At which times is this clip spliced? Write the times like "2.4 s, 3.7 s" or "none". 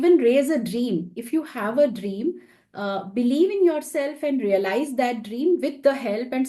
none